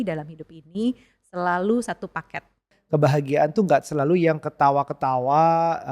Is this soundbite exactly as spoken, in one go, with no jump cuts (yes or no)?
no